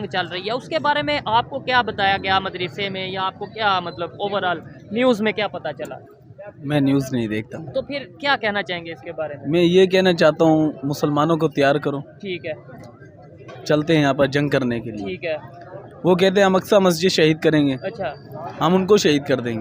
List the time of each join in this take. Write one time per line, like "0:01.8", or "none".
none